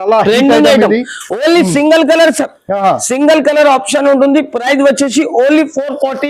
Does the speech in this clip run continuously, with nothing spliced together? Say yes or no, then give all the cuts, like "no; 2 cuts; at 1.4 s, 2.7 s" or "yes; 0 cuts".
yes; 0 cuts